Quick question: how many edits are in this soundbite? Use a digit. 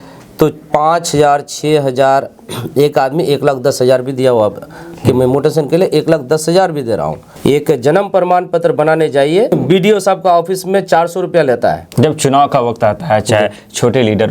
2